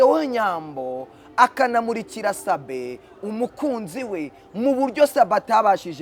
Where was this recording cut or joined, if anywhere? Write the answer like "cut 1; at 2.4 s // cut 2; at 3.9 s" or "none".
none